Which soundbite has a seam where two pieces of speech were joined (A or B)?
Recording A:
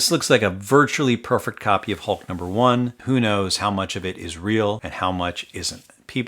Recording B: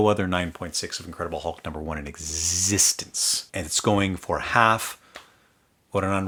A